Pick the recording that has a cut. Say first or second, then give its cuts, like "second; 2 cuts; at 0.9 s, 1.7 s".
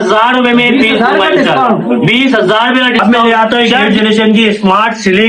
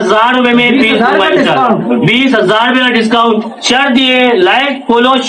first; 1 cut; at 3.0 s